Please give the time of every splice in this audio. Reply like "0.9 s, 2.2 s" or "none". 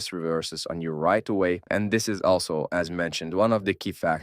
1.6 s